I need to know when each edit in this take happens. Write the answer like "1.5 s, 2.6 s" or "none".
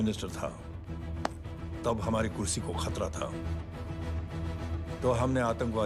none